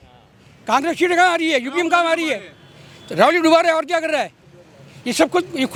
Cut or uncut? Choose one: uncut